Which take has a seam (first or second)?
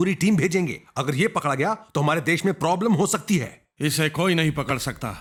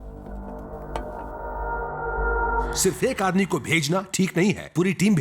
second